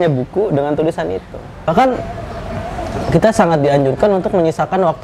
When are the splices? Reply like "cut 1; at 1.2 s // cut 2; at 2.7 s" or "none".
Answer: cut 1; at 1.7 s